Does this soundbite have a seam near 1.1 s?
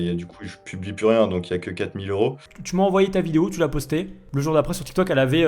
no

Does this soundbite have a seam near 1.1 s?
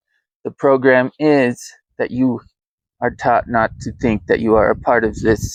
no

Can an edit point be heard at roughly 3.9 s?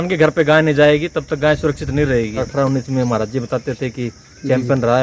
no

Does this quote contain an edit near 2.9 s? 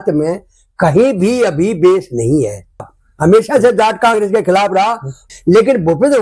yes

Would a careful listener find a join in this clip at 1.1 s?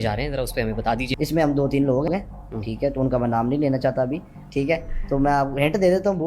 yes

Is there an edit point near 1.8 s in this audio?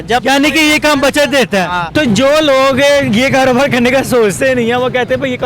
yes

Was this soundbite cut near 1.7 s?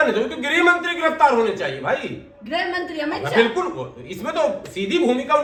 no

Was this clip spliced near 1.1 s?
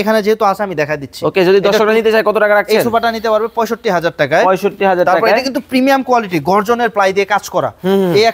no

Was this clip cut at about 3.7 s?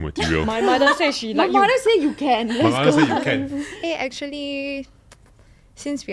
yes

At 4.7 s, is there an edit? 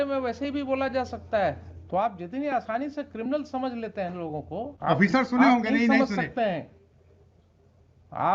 yes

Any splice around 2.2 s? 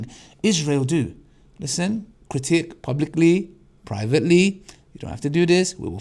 yes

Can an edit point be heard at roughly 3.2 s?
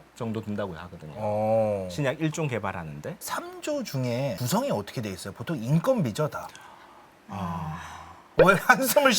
yes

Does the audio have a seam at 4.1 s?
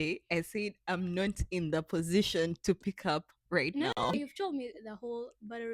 yes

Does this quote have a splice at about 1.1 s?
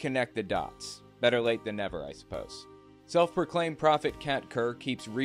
no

